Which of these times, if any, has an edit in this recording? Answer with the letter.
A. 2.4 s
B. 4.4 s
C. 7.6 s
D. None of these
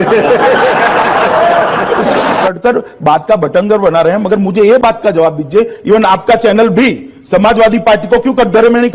A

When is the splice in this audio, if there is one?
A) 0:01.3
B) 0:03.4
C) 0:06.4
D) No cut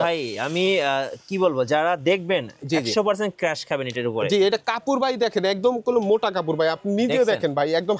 D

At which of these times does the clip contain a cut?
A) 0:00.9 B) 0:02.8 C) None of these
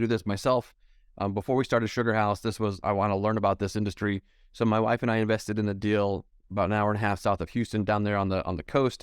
B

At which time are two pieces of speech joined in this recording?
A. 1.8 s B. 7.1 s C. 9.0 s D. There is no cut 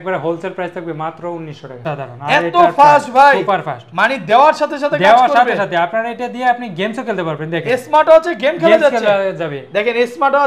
A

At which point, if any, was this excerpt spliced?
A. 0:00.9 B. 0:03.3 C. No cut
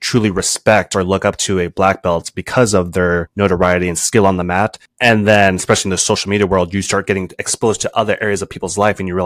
B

